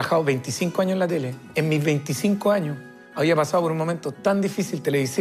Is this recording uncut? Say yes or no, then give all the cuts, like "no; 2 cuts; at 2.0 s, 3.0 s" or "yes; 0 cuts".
yes; 0 cuts